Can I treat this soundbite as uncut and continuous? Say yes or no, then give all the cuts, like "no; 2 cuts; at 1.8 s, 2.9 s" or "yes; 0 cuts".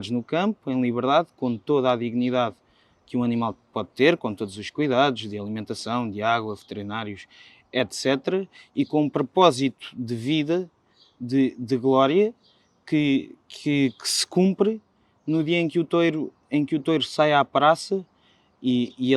yes; 0 cuts